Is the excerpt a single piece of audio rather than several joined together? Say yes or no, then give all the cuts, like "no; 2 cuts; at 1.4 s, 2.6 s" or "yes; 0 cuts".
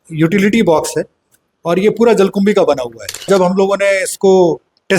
no; 1 cut; at 3.3 s